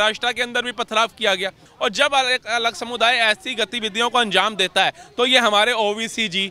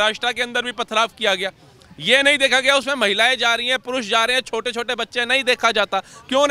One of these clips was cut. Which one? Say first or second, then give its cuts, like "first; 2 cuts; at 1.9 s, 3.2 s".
first; 1 cut; at 1.7 s